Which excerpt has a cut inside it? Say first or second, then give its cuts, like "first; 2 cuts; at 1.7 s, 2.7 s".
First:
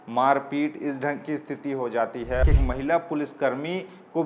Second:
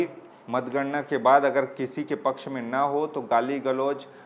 first; 1 cut; at 2.4 s